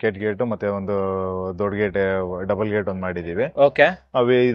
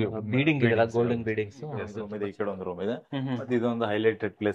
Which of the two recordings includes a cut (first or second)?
second